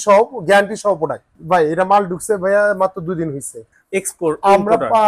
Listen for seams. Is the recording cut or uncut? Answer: uncut